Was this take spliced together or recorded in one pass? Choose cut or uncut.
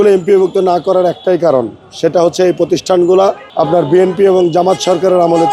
uncut